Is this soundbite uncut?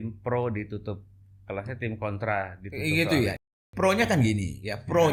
yes; 0 cuts

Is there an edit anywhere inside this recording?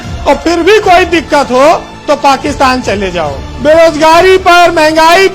yes; 1 cut; at 3.4 s

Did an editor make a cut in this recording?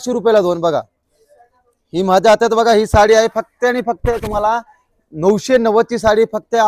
no; 0 cuts

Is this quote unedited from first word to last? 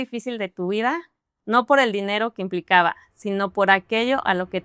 yes; 0 cuts

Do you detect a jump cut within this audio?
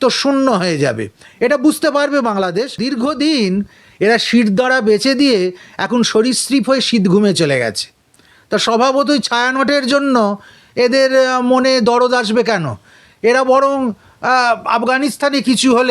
yes; 1 cut; at 2.8 s

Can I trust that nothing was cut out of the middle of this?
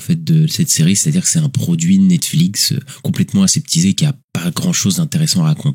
no; 1 cut; at 4.3 s

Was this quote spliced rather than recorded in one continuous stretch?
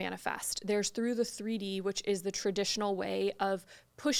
no; 0 cuts

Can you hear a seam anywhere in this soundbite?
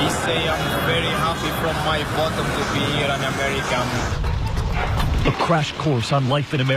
yes; 1 cut; at 5.2 s

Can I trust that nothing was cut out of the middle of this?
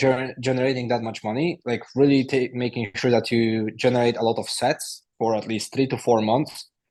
yes; 0 cuts

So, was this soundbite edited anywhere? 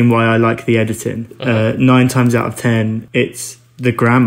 yes; 2 cuts; at 1.3 s, 3.0 s

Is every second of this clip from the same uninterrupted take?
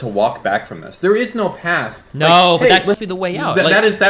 no; 1 cut; at 3.0 s

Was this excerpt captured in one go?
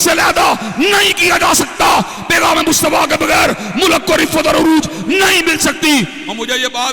no; 1 cut; at 2.2 s

